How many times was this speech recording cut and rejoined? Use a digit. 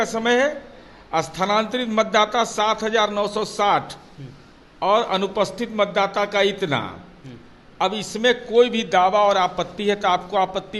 0